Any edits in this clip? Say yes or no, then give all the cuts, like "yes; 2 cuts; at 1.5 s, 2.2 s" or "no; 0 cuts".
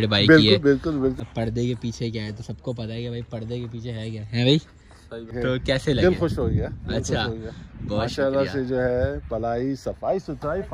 yes; 2 cuts; at 1.2 s, 5.3 s